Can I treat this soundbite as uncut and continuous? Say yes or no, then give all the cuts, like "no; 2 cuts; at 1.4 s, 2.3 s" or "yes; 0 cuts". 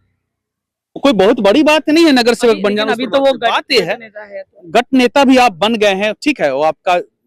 yes; 0 cuts